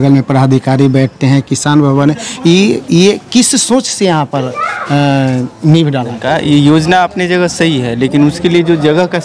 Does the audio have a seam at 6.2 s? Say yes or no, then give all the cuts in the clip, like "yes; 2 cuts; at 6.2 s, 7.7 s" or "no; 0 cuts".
yes; 1 cut; at 6.2 s